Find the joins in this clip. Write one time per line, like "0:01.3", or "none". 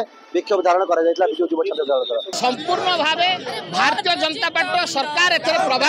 0:02.3